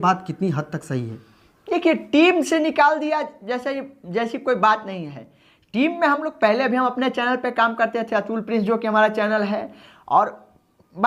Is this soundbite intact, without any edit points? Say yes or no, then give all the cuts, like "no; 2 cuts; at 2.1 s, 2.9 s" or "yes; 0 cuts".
yes; 0 cuts